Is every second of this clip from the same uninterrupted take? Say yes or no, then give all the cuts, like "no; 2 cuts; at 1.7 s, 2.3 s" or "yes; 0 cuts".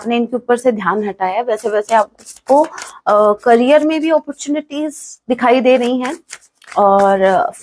yes; 0 cuts